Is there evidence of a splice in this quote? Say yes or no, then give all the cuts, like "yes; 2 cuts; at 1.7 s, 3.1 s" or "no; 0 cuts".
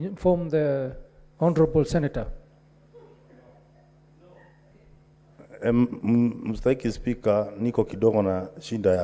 yes; 1 cut; at 4.7 s